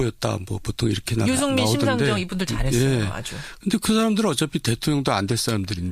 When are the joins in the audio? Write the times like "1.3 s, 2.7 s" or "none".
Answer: 1.0 s